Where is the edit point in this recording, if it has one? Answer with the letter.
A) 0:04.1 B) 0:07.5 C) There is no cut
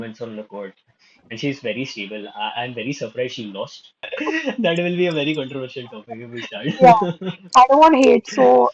A